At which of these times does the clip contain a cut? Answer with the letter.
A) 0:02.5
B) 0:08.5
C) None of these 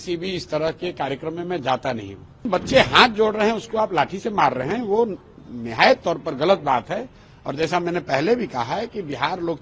A